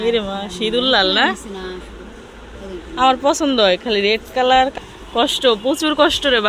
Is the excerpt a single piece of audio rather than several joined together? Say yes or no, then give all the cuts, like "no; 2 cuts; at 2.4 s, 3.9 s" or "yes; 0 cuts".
no; 1 cut; at 4.7 s